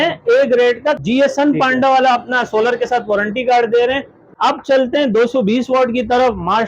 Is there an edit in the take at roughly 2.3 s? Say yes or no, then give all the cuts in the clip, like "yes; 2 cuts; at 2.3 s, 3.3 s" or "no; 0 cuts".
no; 2 cuts; at 1.0 s, 4.1 s